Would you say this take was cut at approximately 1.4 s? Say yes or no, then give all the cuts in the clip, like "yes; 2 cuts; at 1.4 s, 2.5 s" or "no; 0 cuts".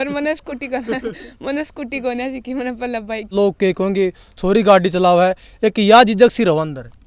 no; 1 cut; at 3.3 s